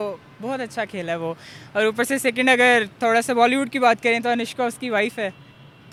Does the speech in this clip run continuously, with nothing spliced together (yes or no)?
yes